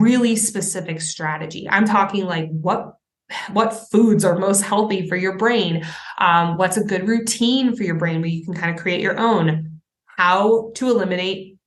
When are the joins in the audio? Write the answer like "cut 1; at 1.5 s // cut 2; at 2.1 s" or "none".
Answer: none